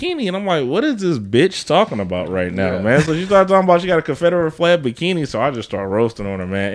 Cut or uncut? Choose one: uncut